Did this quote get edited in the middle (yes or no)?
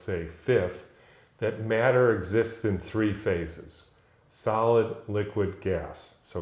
no